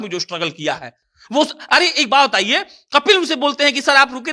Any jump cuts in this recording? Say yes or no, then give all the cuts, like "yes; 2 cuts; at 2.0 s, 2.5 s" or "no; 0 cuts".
no; 0 cuts